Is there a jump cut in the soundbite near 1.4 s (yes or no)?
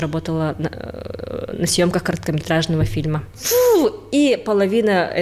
no